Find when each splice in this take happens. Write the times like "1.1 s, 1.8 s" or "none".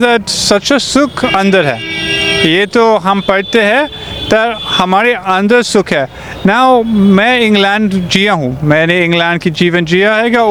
none